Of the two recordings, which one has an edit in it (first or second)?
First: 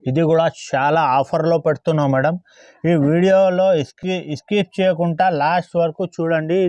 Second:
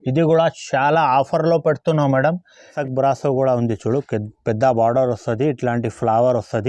second